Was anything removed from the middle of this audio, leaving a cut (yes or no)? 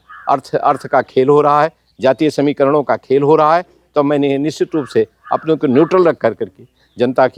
no